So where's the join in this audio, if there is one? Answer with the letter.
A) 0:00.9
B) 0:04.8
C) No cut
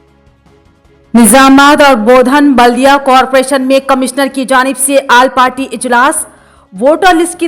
A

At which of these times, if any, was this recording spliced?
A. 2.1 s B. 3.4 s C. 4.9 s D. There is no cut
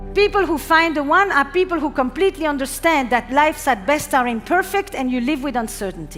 D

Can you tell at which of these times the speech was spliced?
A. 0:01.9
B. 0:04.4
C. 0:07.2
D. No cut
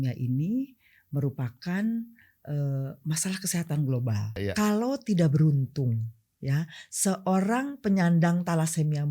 B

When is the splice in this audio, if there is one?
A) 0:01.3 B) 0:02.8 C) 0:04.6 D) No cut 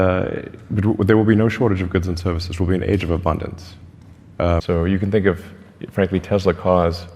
C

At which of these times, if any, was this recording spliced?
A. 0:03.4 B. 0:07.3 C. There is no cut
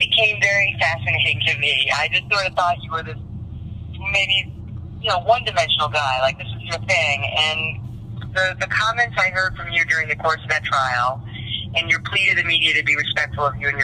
C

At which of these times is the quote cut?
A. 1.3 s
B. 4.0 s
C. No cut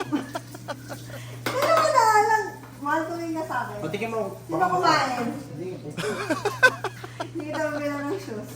A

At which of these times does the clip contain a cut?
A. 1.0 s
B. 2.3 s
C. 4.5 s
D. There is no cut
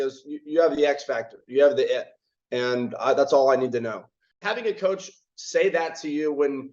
C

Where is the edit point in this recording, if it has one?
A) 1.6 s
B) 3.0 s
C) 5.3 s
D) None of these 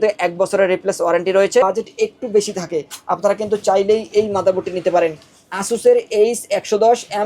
A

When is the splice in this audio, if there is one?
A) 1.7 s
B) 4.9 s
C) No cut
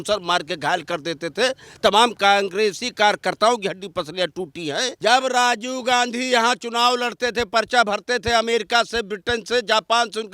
B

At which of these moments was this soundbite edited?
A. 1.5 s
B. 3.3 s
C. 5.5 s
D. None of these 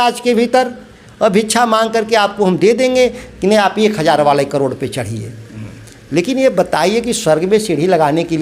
D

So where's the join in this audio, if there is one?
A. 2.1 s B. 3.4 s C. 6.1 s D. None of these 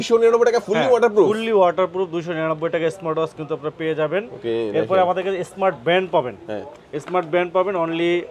D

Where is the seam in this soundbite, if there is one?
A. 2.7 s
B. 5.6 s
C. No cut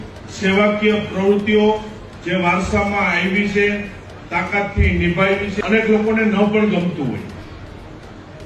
B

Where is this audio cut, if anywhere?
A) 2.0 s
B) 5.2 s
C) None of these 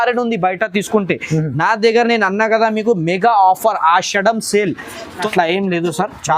B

